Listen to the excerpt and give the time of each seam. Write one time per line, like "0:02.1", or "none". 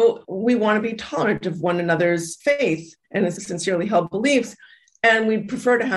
0:02.3
0:03.4